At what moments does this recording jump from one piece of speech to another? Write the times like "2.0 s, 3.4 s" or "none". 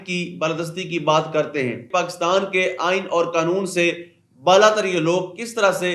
1.9 s